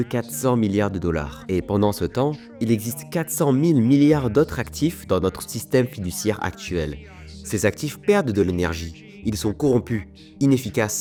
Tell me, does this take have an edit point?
no; 0 cuts

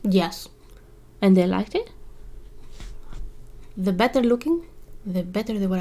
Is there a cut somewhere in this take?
no; 0 cuts

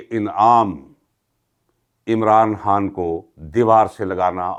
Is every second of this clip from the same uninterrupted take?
yes; 0 cuts

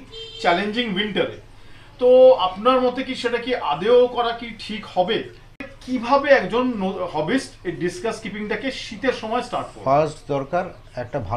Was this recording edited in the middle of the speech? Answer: yes; 1 cut; at 5.8 s

